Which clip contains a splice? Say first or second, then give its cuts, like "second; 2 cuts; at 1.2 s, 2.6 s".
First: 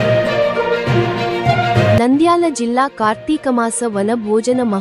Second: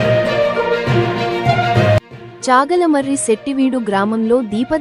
second; 1 cut; at 1.9 s